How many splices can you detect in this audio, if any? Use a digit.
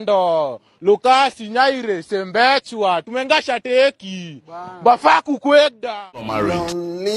1